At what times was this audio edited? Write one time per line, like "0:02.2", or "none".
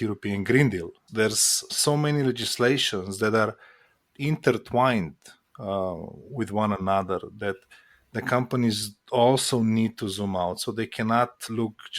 0:01.7